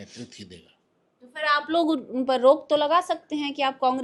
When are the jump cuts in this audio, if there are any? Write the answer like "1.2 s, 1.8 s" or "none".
none